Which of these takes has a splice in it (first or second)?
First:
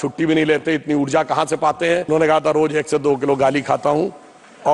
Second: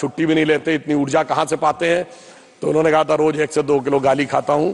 first